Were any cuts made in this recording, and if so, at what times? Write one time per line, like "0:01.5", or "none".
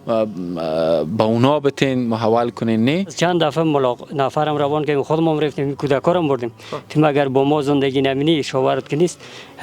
0:03.1